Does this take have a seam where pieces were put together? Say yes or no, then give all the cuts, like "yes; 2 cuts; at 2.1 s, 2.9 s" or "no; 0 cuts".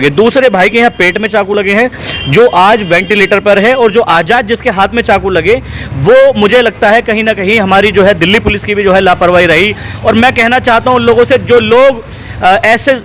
no; 0 cuts